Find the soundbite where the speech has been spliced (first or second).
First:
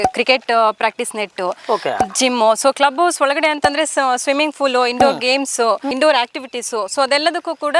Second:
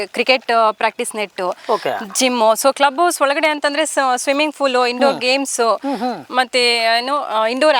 first